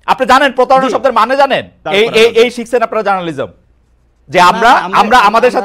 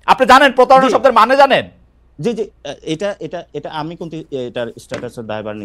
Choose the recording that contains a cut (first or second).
first